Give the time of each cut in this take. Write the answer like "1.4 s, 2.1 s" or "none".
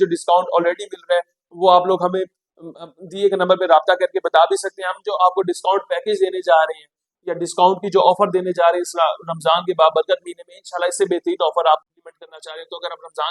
11.8 s